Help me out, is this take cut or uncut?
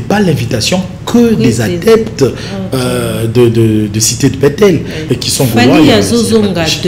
cut